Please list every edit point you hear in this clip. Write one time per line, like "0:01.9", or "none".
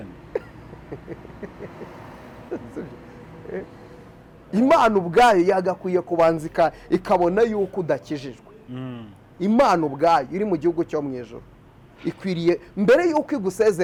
none